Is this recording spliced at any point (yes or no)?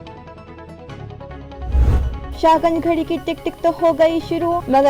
yes